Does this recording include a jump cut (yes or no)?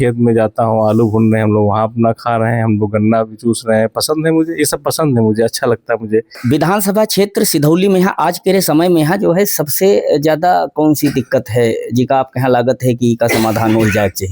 yes